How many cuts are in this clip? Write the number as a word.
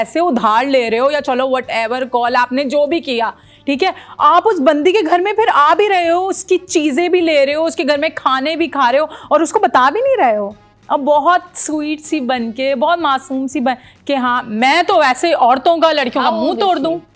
zero